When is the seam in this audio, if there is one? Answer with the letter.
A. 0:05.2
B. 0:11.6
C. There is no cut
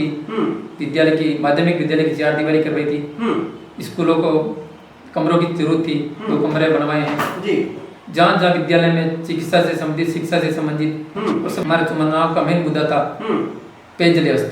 B